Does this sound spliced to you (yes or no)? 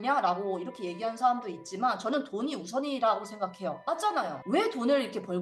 yes